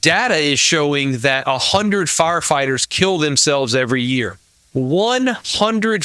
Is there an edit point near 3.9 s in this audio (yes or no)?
no